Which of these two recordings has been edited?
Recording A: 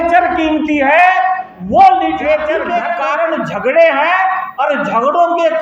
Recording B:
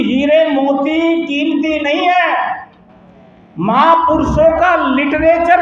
A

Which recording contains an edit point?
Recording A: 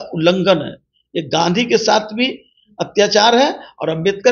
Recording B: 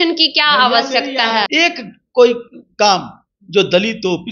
B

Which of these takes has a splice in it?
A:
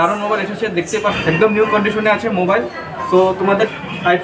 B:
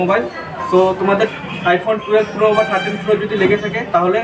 A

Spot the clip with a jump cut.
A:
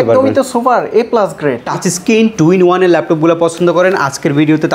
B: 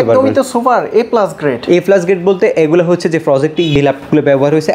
A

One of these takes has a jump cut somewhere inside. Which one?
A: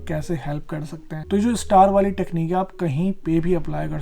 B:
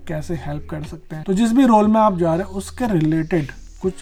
A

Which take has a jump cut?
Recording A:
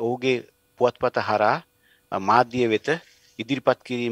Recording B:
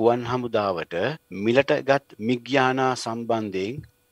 B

